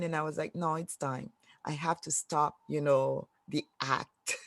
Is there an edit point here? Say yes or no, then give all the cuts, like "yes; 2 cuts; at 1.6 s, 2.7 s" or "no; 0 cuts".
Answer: yes; 1 cut; at 2.6 s